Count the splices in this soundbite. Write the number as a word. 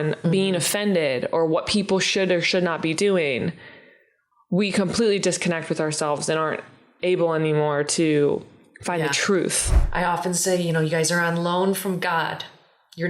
one